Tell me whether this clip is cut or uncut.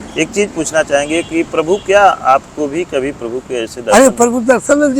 uncut